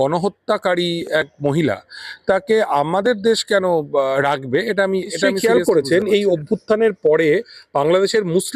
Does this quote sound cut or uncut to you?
cut